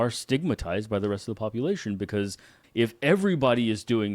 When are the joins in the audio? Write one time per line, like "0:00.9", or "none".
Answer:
0:02.6